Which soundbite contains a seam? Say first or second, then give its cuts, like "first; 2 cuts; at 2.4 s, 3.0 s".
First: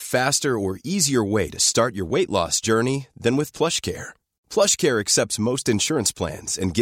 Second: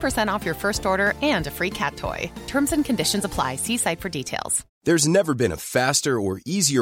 second; 1 cut; at 4.7 s